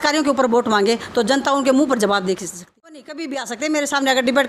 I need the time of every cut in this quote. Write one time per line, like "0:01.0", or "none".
0:02.6